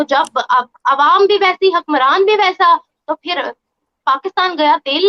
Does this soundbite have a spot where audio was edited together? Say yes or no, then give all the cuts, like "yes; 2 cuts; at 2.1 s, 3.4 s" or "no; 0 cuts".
no; 0 cuts